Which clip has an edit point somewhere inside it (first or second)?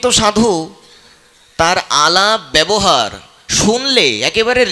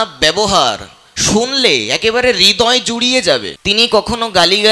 second